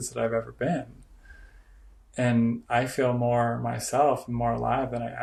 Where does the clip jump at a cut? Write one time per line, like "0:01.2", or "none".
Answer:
none